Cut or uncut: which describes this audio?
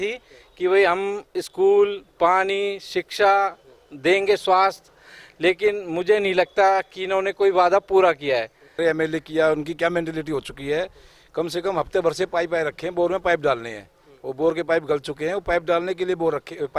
cut